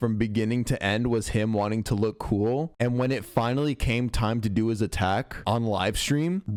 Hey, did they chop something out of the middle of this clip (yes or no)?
no